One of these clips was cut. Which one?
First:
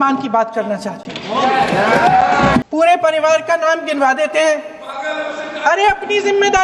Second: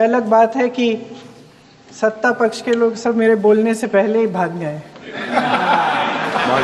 first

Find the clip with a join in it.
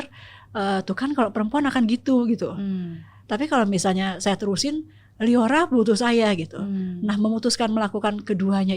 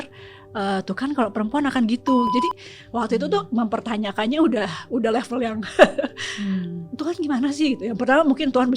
second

